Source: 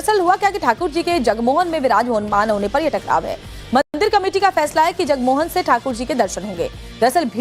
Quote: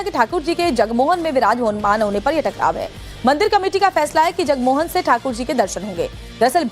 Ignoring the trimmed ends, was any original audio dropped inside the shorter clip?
yes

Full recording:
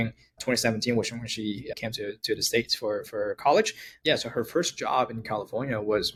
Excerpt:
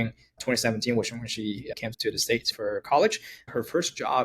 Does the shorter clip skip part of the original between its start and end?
yes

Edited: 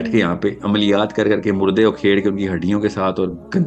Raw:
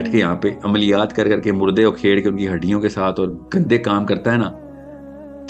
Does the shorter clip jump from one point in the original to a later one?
no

